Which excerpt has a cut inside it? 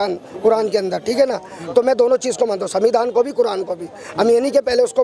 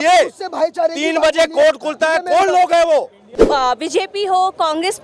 second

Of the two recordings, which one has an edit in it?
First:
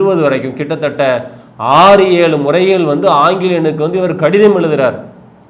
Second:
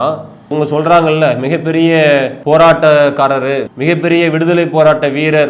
second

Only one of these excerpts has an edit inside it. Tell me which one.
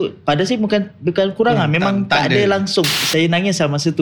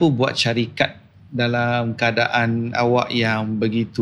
first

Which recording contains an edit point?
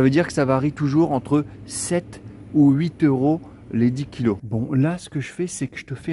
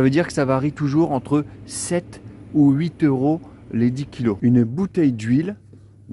second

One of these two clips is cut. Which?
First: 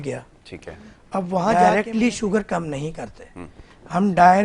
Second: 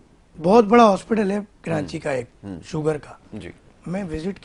first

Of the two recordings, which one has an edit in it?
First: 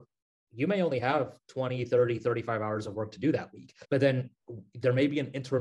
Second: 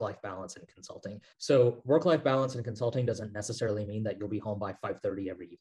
first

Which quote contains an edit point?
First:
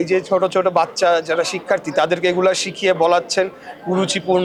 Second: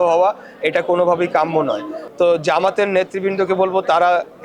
second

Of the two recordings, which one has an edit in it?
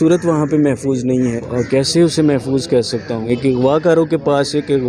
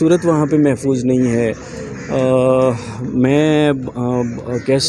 first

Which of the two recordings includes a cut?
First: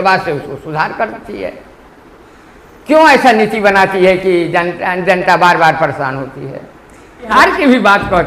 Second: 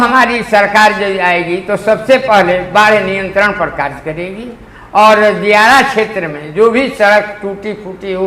first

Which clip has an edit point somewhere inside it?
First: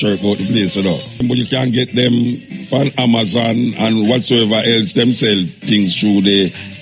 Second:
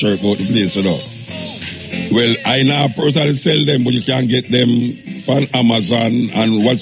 first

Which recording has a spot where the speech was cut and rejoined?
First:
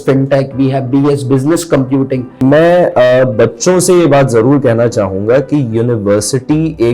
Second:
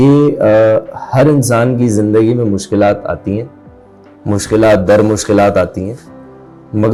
first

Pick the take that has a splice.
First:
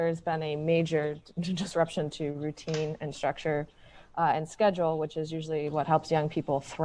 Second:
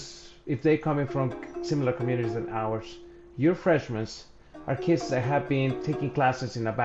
second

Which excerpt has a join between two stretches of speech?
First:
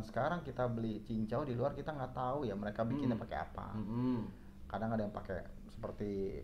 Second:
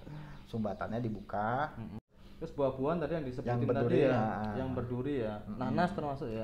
second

